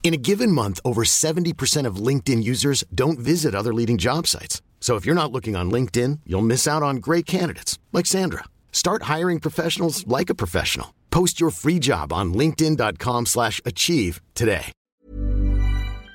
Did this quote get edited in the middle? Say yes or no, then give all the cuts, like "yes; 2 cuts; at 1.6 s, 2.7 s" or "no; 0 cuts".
yes; 1 cut; at 14.8 s